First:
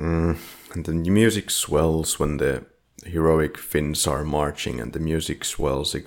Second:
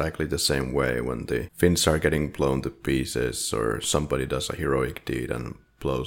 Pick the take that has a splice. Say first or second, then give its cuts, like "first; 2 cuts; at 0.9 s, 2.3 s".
second; 1 cut; at 1.5 s